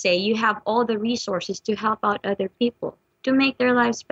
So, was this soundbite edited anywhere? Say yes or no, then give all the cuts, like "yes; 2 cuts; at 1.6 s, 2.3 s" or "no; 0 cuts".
no; 0 cuts